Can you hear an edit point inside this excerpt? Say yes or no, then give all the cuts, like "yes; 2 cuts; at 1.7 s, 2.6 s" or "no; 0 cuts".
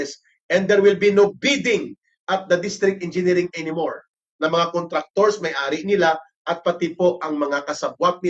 yes; 1 cut; at 4.3 s